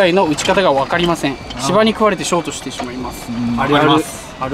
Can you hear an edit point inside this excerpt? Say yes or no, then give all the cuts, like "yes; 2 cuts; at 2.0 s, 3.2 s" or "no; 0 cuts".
no; 0 cuts